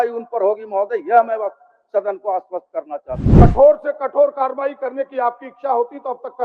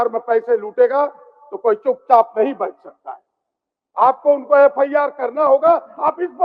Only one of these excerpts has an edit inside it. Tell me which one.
first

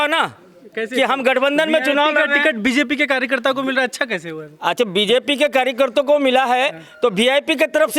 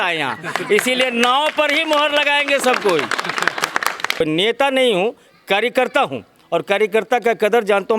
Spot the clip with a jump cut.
second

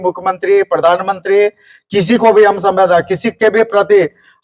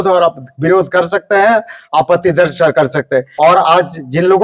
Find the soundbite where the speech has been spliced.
second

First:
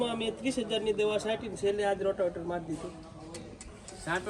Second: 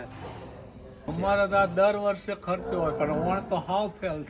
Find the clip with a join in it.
second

